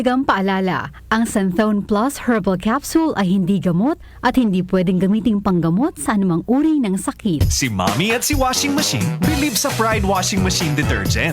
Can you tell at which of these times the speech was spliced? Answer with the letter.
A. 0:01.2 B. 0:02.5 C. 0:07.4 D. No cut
C